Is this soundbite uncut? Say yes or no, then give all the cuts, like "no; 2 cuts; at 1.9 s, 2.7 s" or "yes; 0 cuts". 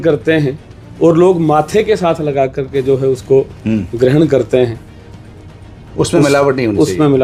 yes; 0 cuts